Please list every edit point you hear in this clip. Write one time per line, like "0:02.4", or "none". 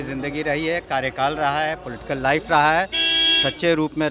none

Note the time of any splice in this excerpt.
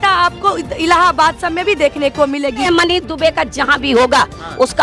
0:02.6

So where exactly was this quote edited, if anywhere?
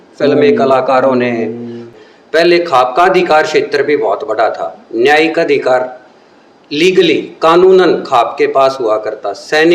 0:01.9

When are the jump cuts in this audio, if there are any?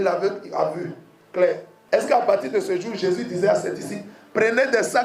0:01.7

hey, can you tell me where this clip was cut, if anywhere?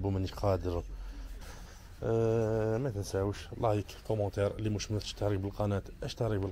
0:01.3

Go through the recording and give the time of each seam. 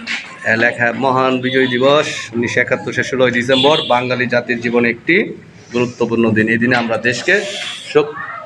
none

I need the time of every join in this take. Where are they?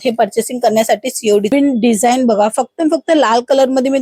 0:01.5

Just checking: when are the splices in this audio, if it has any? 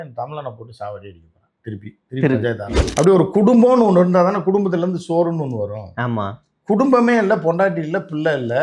0:02.8

